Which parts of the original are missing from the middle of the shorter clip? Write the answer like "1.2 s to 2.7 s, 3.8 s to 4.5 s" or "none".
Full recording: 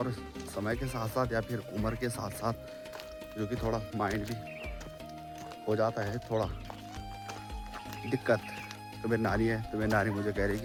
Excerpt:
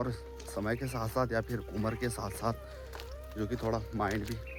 none